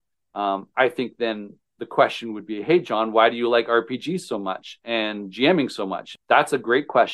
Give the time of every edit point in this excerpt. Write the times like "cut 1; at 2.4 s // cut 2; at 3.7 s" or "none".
cut 1; at 6.1 s

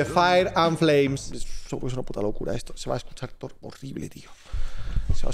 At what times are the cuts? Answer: cut 1; at 1.2 s

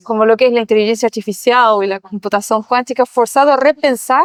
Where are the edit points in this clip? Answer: none

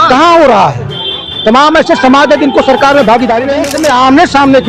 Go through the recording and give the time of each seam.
cut 1; at 3.7 s

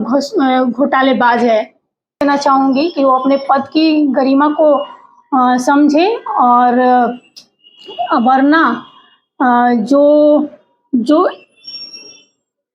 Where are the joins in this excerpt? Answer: cut 1; at 2.0 s

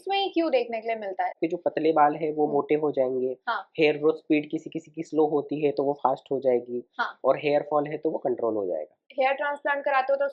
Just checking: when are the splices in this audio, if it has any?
cut 1; at 1.4 s // cut 2; at 9.1 s

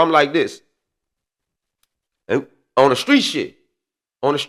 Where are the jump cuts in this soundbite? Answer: none

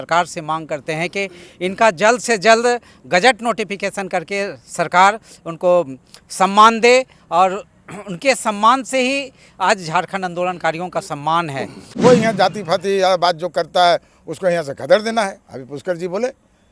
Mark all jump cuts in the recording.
cut 1; at 11.8 s

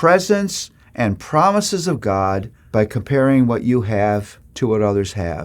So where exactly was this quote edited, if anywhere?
cut 1; at 2.5 s // cut 2; at 4.4 s

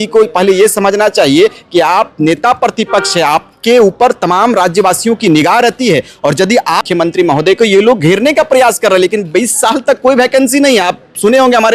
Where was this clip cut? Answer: cut 1; at 6.8 s

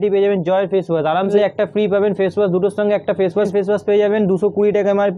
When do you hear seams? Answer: cut 1; at 1.3 s // cut 2; at 3.5 s

